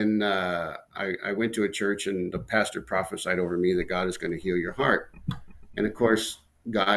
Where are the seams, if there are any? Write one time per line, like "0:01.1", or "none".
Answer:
none

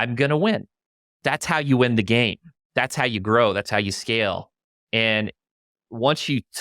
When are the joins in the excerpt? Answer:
0:01.2

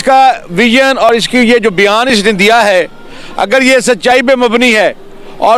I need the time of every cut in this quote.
none

